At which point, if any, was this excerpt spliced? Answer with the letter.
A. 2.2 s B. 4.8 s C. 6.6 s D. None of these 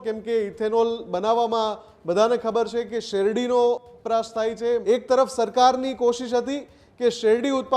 B